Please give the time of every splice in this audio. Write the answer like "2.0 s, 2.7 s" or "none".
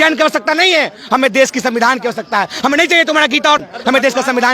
3.6 s